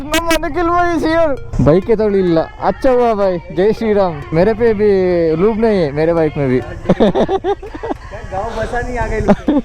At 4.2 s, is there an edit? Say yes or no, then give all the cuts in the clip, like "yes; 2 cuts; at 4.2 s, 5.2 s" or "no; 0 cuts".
yes; 2 cuts; at 1.4 s, 4.2 s